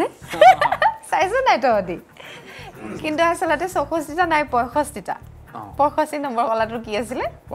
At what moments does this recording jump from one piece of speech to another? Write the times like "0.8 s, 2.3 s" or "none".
none

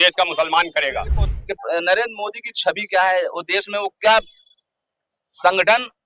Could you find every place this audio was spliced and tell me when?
1.3 s

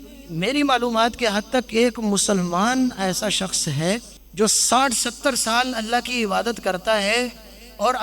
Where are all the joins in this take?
4.2 s

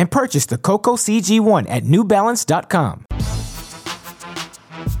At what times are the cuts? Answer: 3.0 s

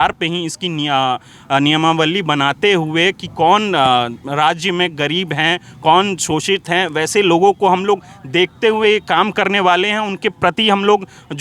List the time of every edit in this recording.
none

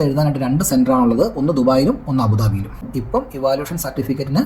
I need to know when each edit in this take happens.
2.9 s

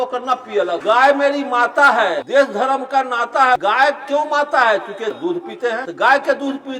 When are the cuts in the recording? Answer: 0.8 s, 2.2 s, 3.6 s, 5.6 s

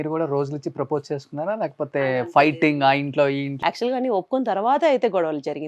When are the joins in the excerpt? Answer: 3.5 s

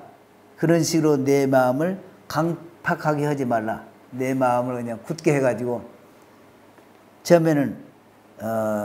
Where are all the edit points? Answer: none

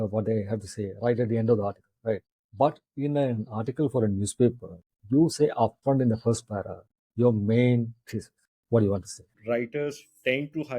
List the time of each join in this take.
2.3 s, 9.3 s

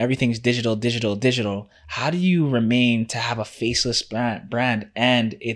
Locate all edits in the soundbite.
none

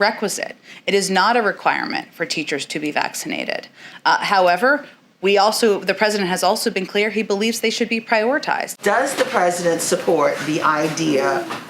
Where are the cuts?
8.7 s

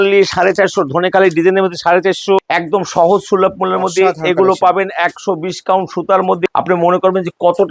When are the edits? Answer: 2.4 s, 6.5 s

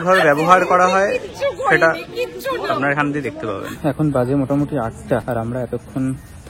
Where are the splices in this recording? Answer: 3.7 s, 5.2 s

